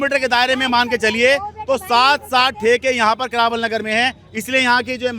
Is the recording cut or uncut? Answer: uncut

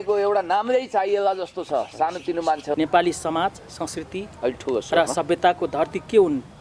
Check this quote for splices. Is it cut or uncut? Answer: cut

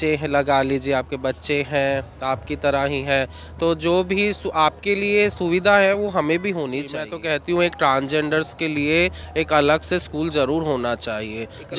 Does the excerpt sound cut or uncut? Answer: cut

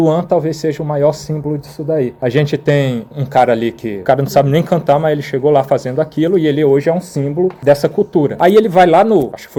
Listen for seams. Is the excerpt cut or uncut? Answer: uncut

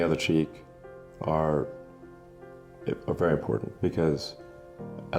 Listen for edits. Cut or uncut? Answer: uncut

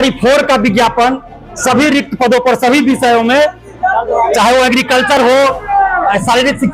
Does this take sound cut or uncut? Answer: uncut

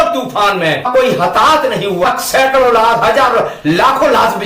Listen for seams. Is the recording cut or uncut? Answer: cut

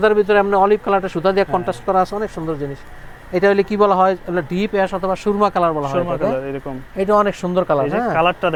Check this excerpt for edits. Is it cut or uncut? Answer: uncut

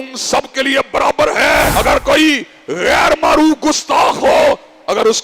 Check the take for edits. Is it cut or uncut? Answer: cut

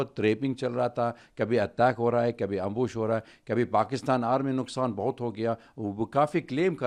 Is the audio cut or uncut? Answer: uncut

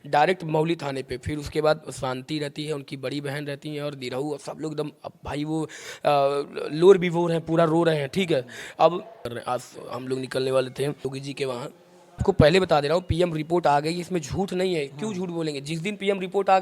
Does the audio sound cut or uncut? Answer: cut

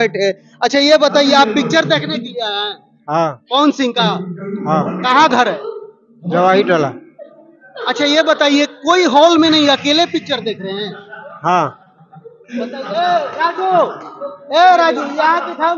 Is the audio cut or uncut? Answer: uncut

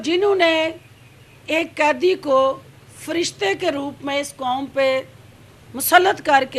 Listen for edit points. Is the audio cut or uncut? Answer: uncut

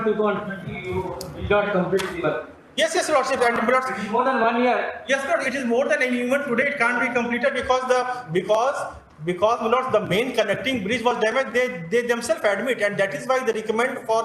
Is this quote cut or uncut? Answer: uncut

